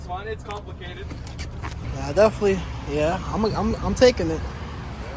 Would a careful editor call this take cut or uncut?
cut